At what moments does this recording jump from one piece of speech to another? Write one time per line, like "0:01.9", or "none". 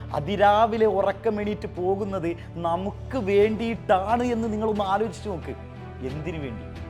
none